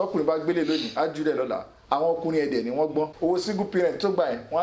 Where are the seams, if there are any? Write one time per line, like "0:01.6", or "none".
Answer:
0:03.1